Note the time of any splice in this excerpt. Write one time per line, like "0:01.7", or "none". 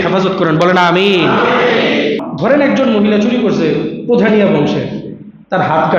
0:02.3